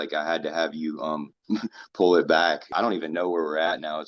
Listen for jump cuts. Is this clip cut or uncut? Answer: cut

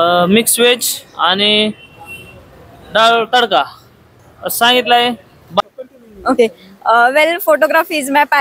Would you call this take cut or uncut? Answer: cut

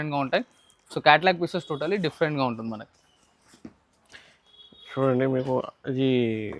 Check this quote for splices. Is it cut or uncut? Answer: uncut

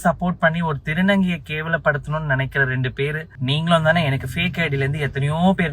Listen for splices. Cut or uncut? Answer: cut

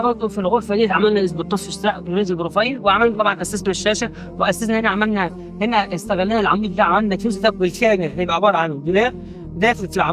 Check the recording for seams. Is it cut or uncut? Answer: uncut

